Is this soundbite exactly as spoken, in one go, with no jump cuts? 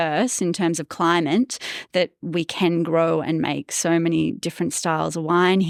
yes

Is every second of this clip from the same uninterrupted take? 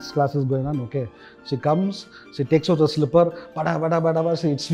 yes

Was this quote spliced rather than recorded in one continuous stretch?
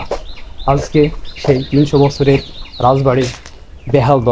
no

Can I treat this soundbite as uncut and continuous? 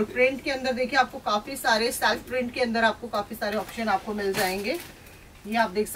yes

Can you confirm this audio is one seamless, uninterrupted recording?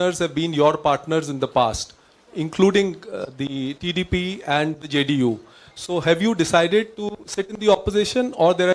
yes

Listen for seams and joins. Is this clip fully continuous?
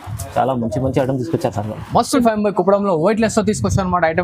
no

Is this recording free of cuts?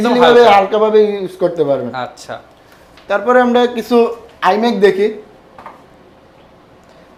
yes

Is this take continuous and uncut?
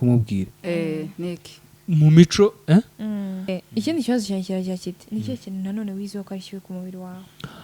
no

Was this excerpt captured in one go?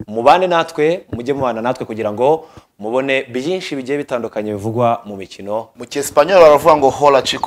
no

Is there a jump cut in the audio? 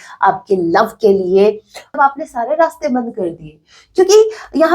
yes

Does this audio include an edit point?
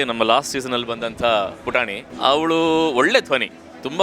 yes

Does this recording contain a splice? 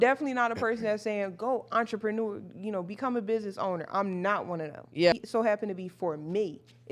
yes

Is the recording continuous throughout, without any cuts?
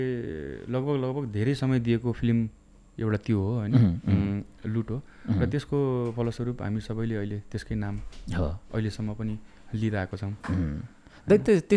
yes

